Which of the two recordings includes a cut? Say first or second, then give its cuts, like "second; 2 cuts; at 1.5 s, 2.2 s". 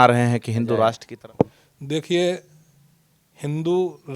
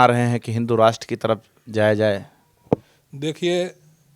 first; 1 cut; at 1.1 s